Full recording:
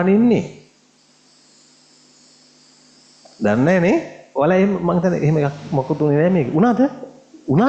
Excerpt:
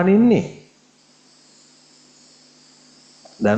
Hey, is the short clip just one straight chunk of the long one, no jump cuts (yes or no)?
yes